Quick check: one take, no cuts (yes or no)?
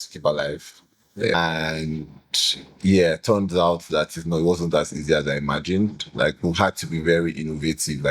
no